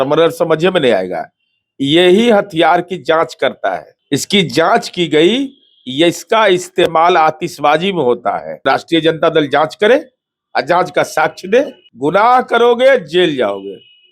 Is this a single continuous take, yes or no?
no